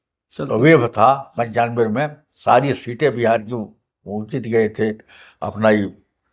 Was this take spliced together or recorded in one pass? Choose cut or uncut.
uncut